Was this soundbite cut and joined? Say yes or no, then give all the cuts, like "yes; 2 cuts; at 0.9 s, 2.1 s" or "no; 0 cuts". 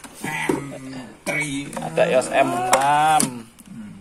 no; 0 cuts